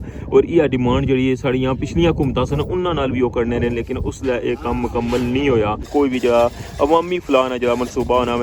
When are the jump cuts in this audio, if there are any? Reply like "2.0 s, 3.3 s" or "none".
5.9 s